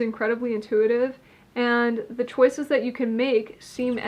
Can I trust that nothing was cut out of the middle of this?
yes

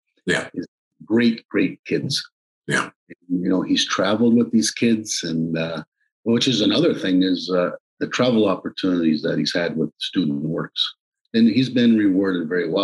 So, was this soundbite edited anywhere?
yes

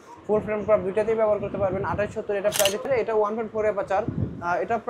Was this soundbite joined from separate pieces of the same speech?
yes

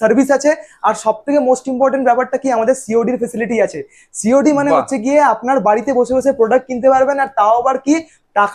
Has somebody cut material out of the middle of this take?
no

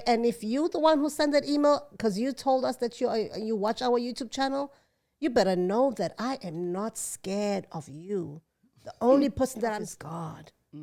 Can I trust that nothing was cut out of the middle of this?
yes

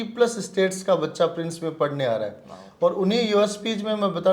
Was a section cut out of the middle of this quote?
no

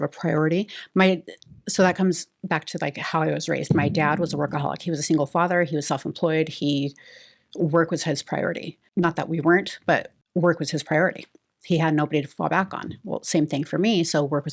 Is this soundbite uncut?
no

